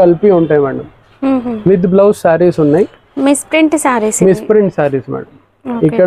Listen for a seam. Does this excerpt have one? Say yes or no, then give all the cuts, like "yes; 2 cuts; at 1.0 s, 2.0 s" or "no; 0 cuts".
no; 0 cuts